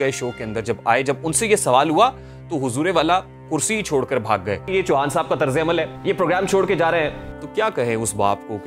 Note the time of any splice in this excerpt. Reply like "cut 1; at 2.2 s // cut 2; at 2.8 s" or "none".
cut 1; at 4.6 s // cut 2; at 7.3 s